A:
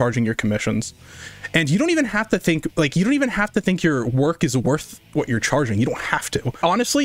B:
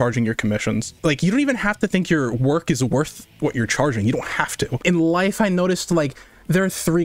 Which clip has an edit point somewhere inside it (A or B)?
B